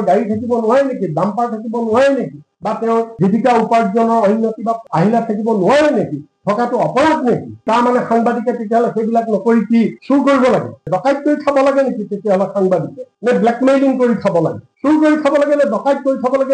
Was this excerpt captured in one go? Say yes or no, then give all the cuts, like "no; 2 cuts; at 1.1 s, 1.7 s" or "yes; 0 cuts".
yes; 0 cuts